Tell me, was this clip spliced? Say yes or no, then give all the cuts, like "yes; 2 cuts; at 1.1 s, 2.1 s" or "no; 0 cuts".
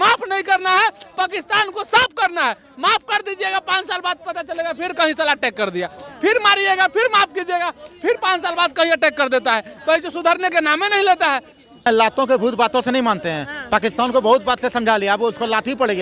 yes; 1 cut; at 11.9 s